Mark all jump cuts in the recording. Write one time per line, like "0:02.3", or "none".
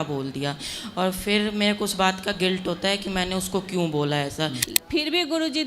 0:04.7